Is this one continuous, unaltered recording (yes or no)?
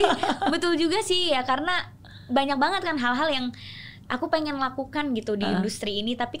yes